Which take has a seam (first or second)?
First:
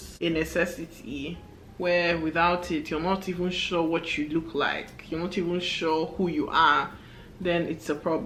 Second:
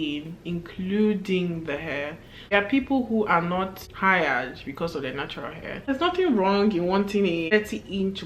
second